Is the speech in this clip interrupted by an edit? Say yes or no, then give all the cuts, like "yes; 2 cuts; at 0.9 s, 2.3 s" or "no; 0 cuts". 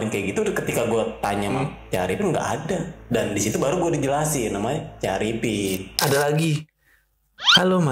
yes; 1 cut; at 6.0 s